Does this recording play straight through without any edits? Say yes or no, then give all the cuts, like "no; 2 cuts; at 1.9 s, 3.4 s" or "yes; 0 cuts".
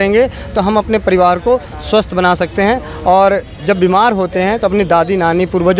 yes; 0 cuts